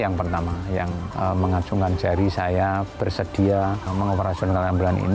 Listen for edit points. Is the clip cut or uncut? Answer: cut